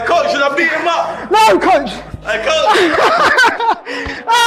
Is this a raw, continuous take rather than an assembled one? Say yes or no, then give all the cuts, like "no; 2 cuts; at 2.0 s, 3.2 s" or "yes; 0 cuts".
yes; 0 cuts